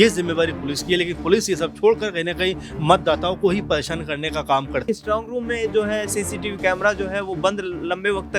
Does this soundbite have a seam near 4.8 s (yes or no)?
yes